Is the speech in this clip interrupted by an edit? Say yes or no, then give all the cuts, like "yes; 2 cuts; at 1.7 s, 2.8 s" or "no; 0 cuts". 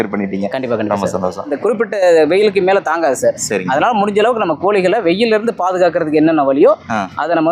yes; 1 cut; at 1.5 s